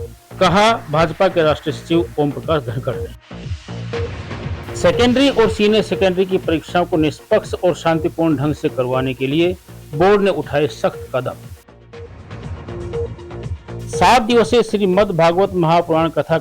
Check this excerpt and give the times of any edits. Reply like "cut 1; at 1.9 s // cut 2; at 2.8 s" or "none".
cut 1; at 14.0 s